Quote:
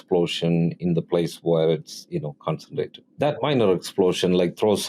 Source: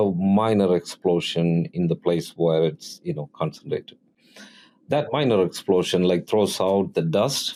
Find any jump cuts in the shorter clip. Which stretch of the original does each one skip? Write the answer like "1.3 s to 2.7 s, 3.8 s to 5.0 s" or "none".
4.0 s to 4.7 s